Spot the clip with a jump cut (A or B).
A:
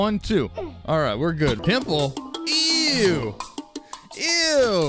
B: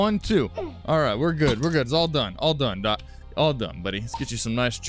A